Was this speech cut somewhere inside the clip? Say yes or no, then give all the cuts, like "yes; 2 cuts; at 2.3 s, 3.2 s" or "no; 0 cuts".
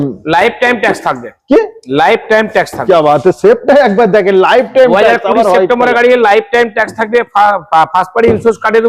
no; 0 cuts